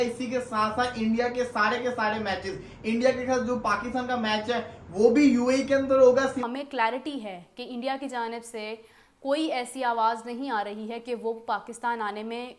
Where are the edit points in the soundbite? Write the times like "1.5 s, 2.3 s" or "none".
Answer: 6.4 s